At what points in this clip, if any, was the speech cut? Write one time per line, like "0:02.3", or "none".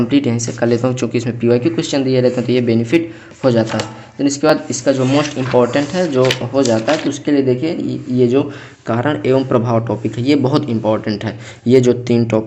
none